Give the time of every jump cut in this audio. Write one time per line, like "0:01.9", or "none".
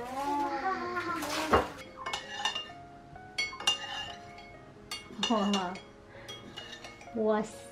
none